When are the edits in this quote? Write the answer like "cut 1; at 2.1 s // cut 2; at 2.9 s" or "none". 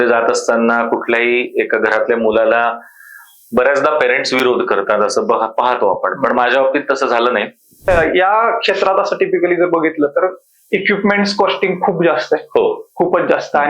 cut 1; at 7.9 s